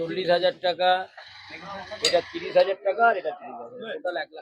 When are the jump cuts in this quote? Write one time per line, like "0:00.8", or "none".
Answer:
none